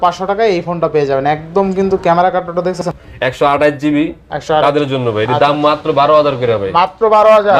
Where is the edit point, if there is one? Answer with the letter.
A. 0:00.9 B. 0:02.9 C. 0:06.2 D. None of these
B